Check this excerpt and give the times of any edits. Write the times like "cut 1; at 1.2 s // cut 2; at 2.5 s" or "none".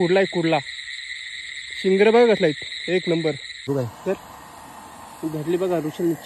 cut 1; at 3.7 s